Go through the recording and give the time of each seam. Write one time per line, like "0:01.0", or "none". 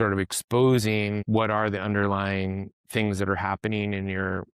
0:01.2